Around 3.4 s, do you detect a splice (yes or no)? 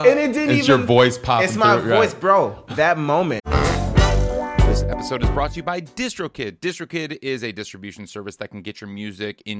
yes